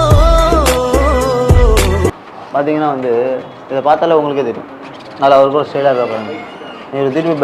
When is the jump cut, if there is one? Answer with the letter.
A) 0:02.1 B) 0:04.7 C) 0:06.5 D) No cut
A